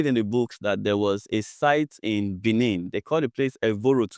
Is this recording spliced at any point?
no; 0 cuts

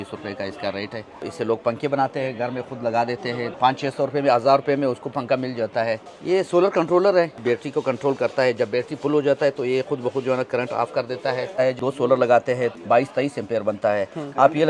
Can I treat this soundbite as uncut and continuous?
no; 6 cuts; at 1.2 s, 3.5 s, 6.1 s, 7.4 s, 11.8 s, 12.8 s

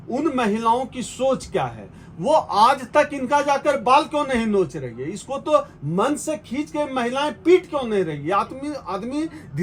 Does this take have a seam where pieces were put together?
no; 0 cuts

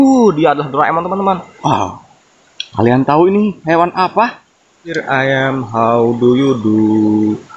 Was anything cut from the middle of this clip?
yes; 2 cuts; at 1.5 s, 5.0 s

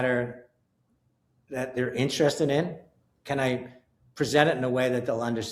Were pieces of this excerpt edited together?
no; 0 cuts

